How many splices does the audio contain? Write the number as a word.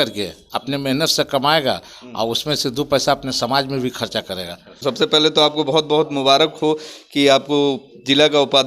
one